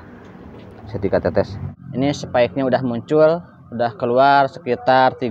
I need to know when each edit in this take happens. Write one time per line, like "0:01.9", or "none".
0:01.4